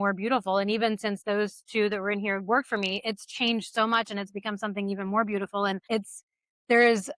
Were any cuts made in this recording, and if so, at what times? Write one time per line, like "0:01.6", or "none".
0:05.8

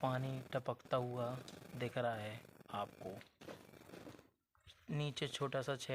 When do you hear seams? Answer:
none

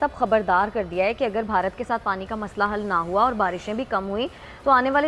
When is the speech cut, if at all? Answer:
none

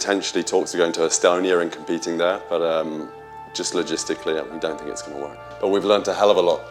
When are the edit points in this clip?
0:05.5

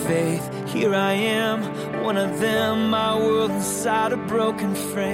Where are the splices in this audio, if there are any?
none

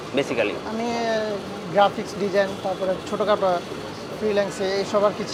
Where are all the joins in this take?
none

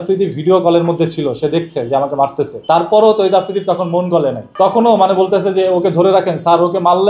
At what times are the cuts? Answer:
0:02.6
0:04.5

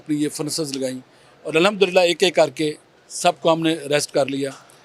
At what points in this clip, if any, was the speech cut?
none

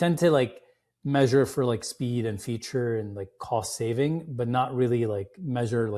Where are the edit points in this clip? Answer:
none

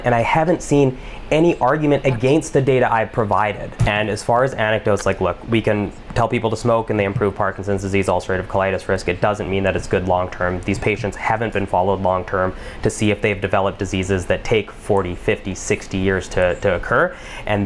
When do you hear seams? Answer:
0:03.8

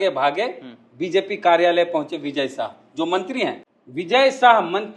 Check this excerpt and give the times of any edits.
0:03.7

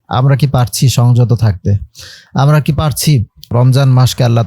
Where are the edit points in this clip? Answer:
0:03.5

